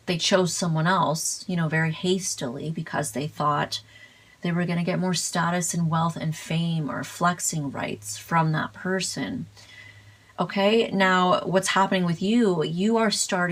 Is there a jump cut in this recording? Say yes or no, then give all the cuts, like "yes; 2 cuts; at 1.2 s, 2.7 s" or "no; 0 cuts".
no; 0 cuts